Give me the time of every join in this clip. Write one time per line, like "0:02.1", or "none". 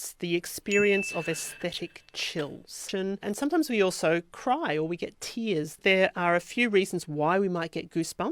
none